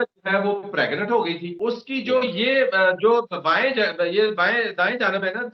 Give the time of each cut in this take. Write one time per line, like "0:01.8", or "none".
0:01.5

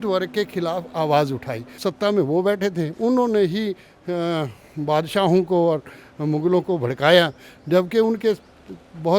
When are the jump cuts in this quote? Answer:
0:01.7

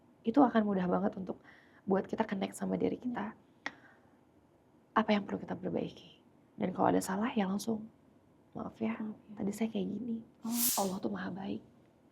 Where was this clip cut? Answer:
0:10.7

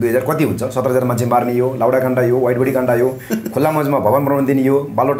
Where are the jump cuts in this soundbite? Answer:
none

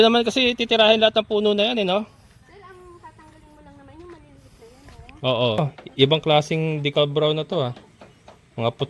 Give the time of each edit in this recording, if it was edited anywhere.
0:05.6

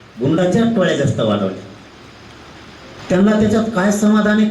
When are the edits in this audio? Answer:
0:03.0

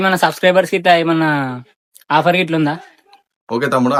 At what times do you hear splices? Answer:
none

